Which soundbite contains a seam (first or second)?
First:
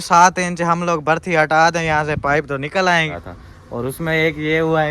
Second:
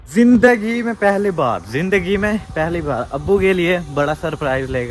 first